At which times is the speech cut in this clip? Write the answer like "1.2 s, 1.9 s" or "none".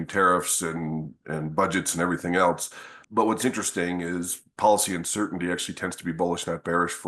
3.0 s